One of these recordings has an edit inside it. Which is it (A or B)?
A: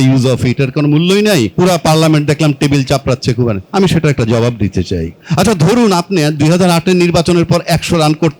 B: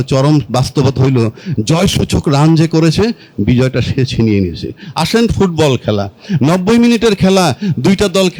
A